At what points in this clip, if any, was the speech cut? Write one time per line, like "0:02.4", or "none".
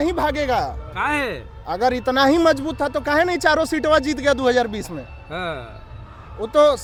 none